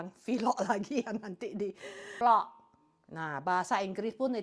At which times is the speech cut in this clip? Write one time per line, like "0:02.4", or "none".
0:02.1